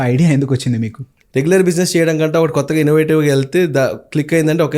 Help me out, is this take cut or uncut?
cut